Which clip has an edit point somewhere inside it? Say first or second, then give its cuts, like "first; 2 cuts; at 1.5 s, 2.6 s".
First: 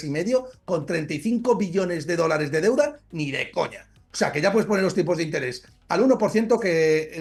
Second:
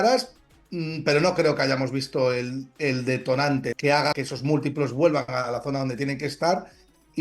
second; 1 cut; at 3.9 s